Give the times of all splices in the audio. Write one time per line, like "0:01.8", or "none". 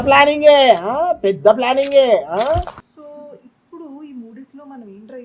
0:02.9